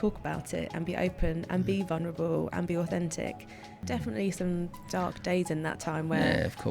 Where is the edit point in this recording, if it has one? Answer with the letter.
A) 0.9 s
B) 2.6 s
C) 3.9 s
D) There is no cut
C